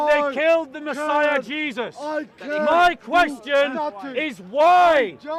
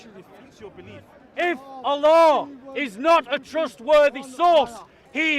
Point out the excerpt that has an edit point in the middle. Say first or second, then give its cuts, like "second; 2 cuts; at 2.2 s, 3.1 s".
second; 1 cut; at 1.2 s